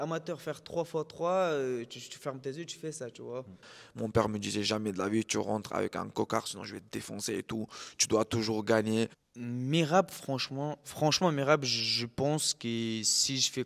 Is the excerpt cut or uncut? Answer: cut